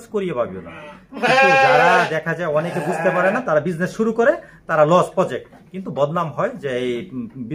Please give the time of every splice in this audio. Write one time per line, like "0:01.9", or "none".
none